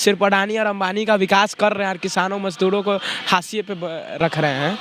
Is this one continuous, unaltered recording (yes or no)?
yes